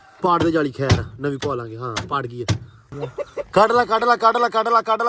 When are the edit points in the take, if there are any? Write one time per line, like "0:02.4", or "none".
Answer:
0:02.8

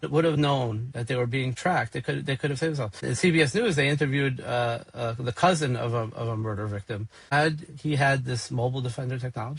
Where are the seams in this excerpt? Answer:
0:03.0
0:07.3

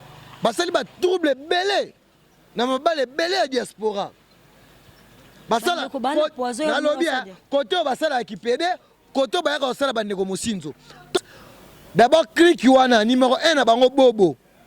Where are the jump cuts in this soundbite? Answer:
0:11.2

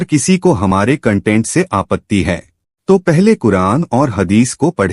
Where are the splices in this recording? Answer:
none

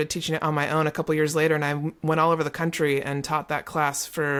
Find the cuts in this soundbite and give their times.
none

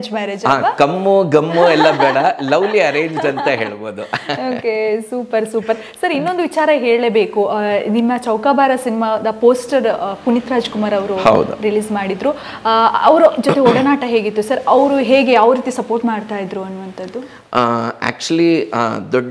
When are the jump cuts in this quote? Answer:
none

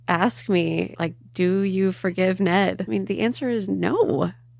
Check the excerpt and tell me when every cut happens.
0:00.9
0:02.8

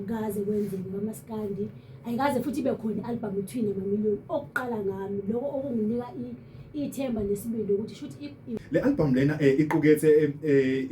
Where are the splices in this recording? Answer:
0:08.5

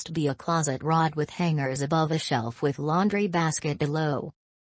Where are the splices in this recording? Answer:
none

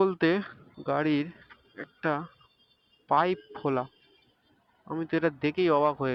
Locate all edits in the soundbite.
none

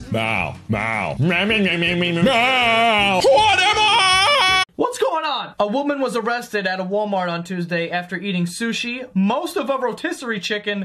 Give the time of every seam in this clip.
0:04.6

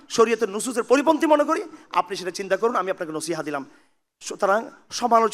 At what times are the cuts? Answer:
none

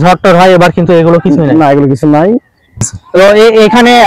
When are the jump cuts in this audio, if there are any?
0:02.9

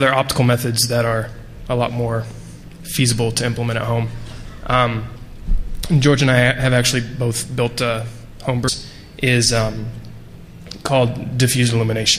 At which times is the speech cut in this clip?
none

